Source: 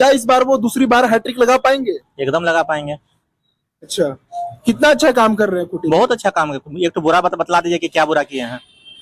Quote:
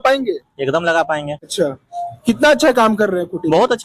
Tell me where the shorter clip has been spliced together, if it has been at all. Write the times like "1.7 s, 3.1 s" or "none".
1.4 s